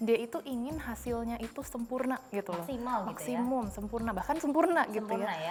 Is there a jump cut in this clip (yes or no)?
no